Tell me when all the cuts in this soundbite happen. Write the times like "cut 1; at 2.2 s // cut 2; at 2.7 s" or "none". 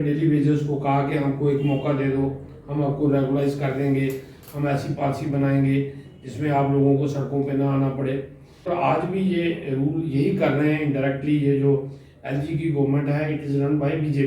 cut 1; at 8.7 s